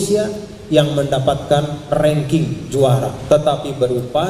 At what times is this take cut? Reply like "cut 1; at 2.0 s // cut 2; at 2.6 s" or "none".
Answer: cut 1; at 3.1 s